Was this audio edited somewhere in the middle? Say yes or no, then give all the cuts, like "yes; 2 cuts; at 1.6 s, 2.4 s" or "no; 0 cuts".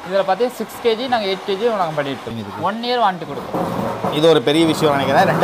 yes; 1 cut; at 2.3 s